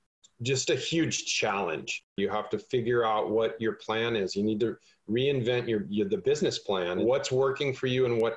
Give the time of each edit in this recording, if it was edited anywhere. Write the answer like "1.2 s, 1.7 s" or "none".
2.1 s, 7.0 s